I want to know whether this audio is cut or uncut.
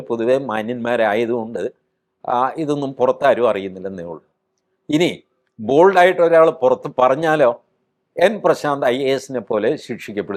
uncut